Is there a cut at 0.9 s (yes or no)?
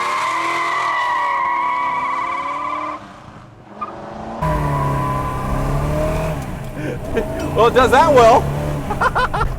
no